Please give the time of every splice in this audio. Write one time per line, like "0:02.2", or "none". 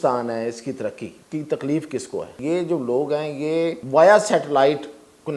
0:01.1
0:02.3
0:03.8